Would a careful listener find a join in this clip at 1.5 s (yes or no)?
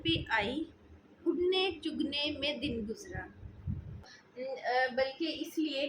no